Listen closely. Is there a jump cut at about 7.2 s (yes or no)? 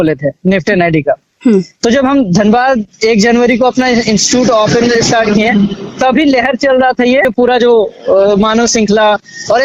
no